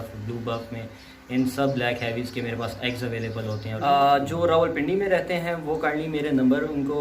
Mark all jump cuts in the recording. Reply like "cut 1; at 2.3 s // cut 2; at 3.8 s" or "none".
cut 1; at 3.8 s